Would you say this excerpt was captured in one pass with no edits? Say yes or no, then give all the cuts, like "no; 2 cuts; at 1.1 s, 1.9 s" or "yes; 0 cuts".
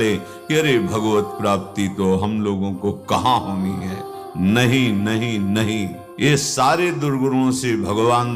no; 1 cut; at 6.2 s